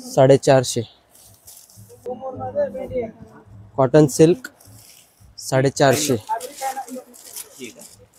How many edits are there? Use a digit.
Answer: 0